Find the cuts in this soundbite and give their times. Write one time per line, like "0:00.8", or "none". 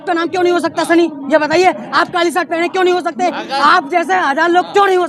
none